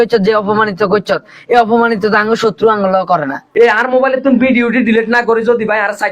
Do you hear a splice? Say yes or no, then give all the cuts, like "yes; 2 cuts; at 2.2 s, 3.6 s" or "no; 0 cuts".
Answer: yes; 1 cut; at 3.4 s